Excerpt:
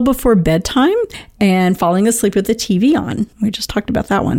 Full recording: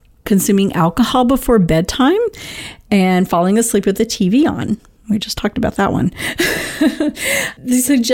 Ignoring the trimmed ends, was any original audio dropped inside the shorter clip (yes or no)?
yes